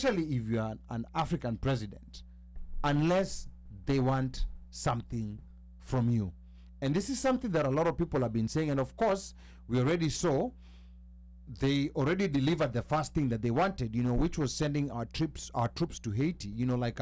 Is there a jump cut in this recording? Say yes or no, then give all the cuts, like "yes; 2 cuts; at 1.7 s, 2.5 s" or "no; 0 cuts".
no; 0 cuts